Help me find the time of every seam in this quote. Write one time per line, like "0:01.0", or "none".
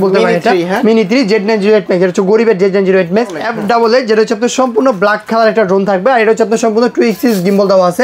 0:03.4